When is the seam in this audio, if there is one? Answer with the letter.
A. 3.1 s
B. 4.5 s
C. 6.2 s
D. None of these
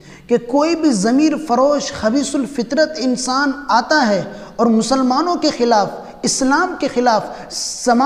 D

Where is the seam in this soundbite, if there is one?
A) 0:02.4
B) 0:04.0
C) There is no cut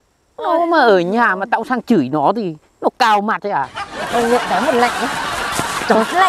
B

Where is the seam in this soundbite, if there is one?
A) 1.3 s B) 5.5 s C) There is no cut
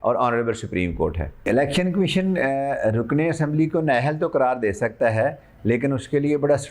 C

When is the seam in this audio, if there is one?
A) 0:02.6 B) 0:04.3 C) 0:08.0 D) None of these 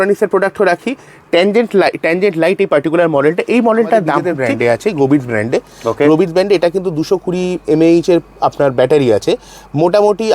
B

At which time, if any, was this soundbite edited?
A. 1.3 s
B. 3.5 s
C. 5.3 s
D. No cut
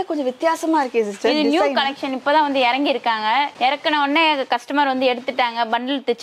D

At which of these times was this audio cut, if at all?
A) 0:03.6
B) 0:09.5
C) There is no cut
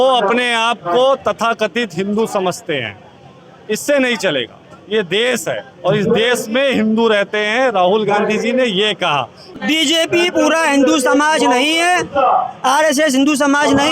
B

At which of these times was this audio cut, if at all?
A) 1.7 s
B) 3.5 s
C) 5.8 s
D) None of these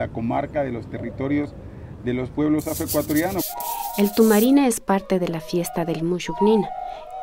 B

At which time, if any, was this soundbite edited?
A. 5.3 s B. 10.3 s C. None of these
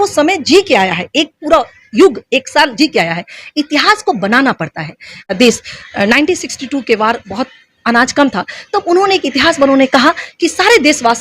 A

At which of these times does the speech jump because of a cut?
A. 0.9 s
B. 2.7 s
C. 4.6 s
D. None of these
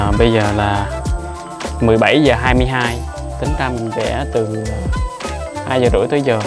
D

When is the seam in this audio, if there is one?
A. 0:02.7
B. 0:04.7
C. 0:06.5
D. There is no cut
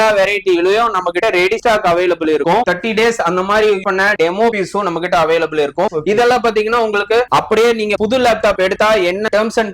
A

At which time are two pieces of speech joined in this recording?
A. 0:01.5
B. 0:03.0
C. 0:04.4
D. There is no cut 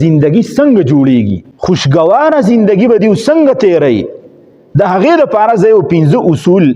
A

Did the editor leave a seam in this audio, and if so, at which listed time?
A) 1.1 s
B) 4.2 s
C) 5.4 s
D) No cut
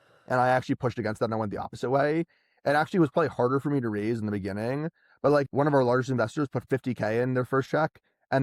C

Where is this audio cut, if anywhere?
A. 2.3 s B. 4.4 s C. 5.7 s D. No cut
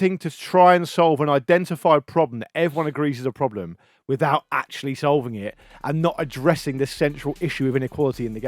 C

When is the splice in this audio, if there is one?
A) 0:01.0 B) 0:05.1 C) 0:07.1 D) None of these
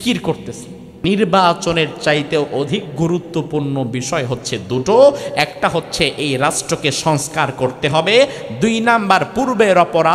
A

